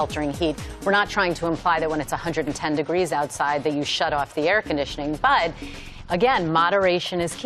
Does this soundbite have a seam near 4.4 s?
no; 1 cut; at 1.3 s

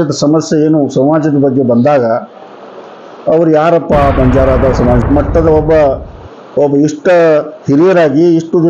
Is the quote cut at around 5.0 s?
yes; 1 cut; at 5.0 s

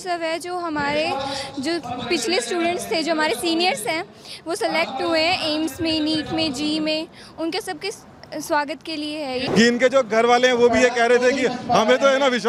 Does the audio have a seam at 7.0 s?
no; 1 cut; at 9.4 s

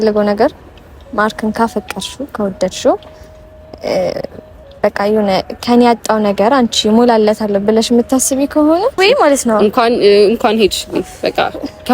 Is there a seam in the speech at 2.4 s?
no; 1 cut; at 9.0 s

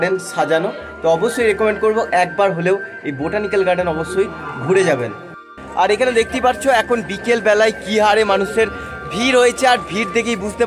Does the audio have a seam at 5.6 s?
yes; 1 cut; at 5.6 s

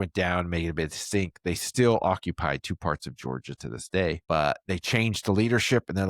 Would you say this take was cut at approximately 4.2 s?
yes; 1 cut; at 4.2 s

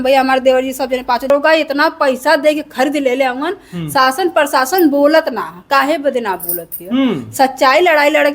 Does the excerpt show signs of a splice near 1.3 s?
yes; 1 cut; at 1.3 s

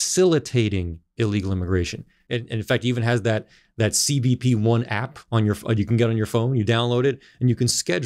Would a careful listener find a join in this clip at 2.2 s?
yes; 1 cut; at 2.2 s

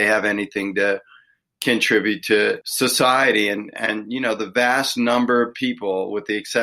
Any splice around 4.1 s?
no; 1 cut; at 2.7 s

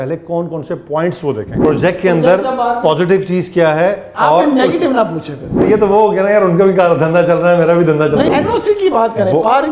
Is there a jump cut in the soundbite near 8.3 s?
yes; 3 cuts; at 1.6 s, 5.6 s, 8.3 s

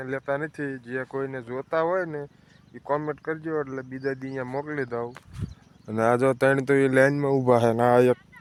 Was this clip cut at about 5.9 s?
no; 0 cuts

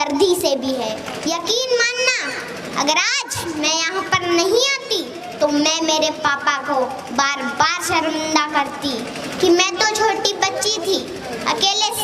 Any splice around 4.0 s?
no; 1 cut; at 1.1 s

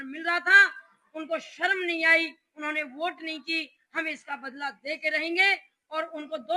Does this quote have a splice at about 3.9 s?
no; 0 cuts

